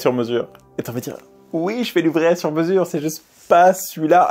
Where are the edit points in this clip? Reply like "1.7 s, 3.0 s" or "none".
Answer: none